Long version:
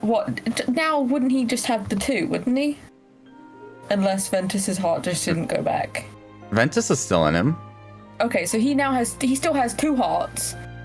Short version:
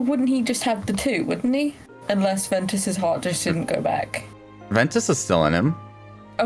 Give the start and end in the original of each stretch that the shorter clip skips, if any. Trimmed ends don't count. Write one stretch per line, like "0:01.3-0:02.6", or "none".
0:02.9-0:03.7